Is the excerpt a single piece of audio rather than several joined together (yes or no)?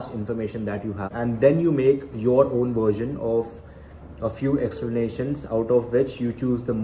no